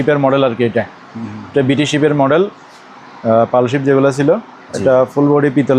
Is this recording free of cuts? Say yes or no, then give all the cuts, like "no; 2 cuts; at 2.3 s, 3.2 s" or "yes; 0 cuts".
yes; 0 cuts